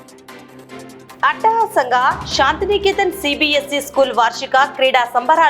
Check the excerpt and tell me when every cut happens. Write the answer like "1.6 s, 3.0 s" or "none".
1.2 s